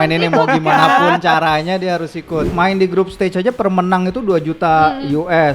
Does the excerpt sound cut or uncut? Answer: cut